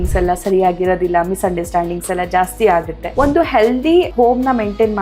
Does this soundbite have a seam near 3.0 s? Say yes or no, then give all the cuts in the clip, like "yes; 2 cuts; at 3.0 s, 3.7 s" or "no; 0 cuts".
yes; 2 cuts; at 3.0 s, 4.1 s